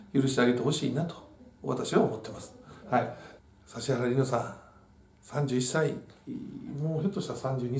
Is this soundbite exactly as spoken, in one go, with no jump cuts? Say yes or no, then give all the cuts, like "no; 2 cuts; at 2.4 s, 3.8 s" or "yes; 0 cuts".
no; 1 cut; at 3.4 s